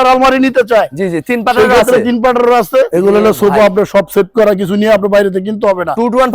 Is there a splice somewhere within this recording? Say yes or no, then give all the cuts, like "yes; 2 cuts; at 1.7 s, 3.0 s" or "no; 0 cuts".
yes; 1 cut; at 2.9 s